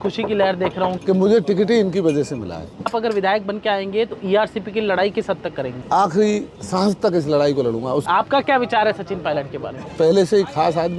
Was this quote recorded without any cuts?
no; 5 cuts; at 1.0 s, 2.9 s, 5.8 s, 8.0 s, 9.8 s

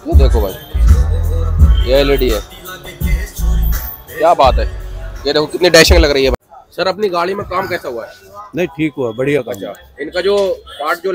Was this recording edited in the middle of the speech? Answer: yes; 1 cut; at 6.4 s

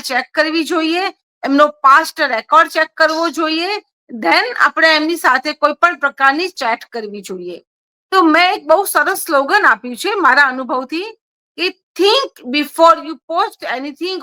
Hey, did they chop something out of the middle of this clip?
no; 0 cuts

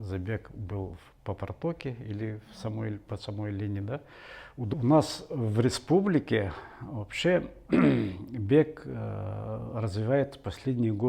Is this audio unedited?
no; 1 cut; at 4.5 s

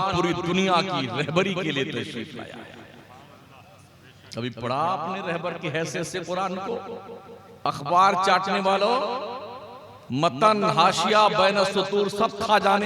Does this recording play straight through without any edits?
yes; 0 cuts

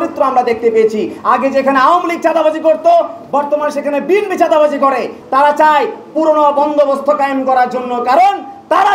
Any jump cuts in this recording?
yes; 2 cuts; at 1.1 s, 5.2 s

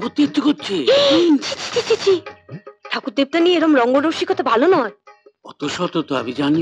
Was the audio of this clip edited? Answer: no; 0 cuts

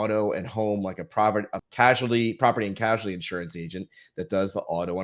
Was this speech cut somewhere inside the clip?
yes; 1 cut; at 1.6 s

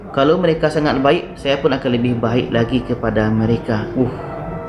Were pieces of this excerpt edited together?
no; 0 cuts

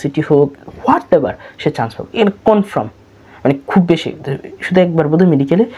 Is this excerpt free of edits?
yes; 0 cuts

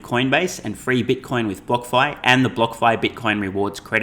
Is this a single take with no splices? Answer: yes; 0 cuts

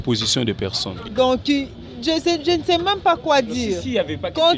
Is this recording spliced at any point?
yes; 1 cut; at 0.9 s

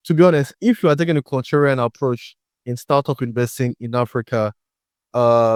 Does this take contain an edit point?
no; 0 cuts

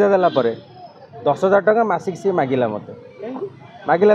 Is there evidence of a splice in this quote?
no; 0 cuts

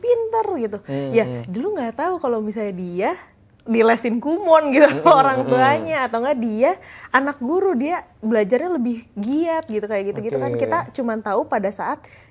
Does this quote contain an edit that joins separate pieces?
no; 0 cuts

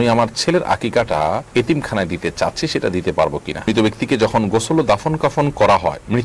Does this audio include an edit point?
yes; 2 cuts; at 1.5 s, 3.7 s

